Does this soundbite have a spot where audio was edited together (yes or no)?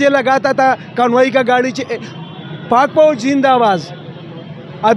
no